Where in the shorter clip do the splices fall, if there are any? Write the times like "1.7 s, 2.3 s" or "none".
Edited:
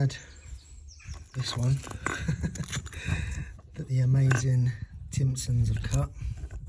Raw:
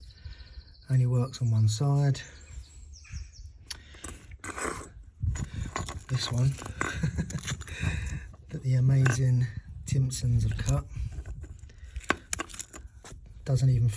1.2 s